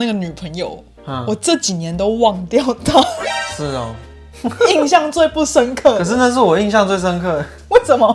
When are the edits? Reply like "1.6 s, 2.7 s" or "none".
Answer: none